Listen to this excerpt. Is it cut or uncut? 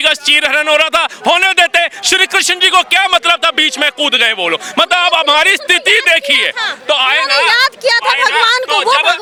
uncut